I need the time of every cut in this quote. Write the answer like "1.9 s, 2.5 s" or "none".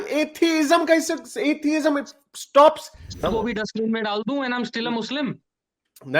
3.2 s

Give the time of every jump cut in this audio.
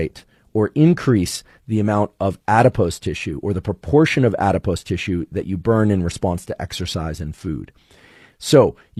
none

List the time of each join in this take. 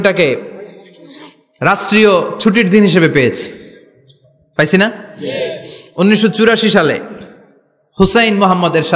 none

